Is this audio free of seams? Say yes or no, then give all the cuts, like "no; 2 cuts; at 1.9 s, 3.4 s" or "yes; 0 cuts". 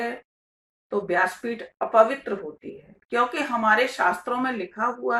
yes; 0 cuts